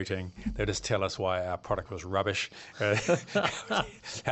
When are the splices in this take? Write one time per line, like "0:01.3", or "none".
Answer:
none